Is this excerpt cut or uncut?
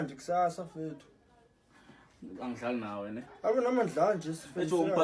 uncut